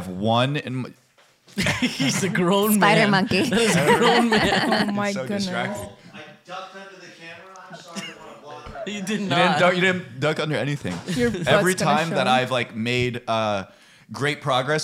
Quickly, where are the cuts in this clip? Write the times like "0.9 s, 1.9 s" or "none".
none